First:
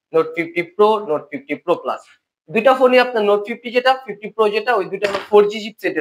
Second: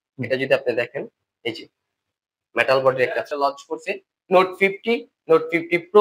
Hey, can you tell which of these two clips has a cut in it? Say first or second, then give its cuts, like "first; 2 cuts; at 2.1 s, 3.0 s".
second; 1 cut; at 3.2 s